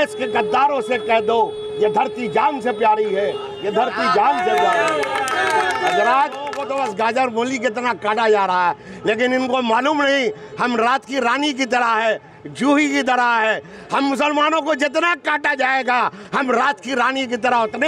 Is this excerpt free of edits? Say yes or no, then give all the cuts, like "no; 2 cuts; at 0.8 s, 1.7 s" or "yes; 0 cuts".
no; 1 cut; at 6.6 s